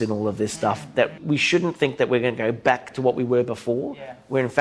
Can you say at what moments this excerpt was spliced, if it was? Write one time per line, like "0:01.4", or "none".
0:02.9